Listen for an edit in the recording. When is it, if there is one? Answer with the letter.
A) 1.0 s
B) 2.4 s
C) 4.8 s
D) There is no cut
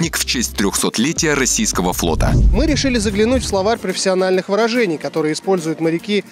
B